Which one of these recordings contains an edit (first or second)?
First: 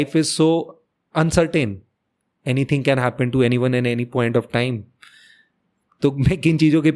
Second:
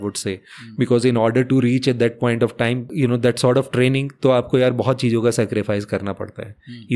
second